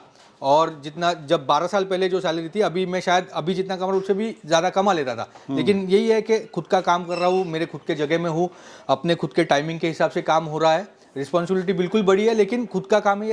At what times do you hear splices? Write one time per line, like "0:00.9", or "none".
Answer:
none

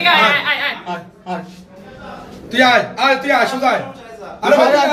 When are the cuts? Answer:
none

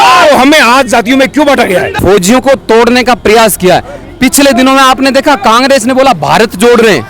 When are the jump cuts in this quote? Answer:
0:02.0

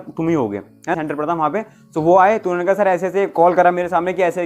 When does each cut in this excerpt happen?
0:00.9

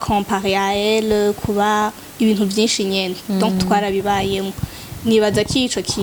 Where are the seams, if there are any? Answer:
none

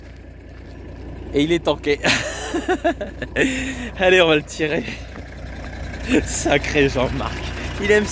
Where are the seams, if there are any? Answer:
none

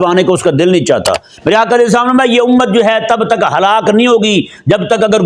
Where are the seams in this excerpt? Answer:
0:01.3

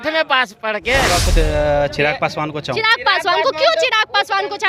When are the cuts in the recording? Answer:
0:01.1

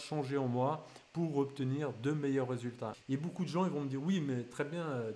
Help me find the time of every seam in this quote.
0:02.9

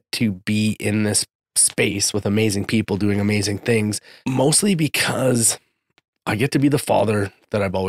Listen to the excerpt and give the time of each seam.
0:04.1

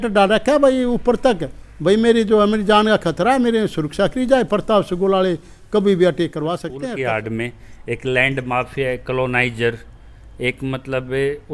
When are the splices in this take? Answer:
0:06.7

